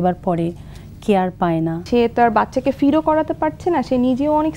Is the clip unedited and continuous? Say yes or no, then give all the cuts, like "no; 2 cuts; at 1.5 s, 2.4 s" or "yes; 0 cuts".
no; 1 cut; at 1.8 s